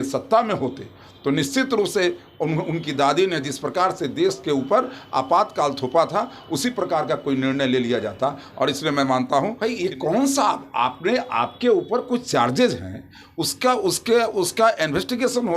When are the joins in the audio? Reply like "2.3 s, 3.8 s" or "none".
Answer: 9.6 s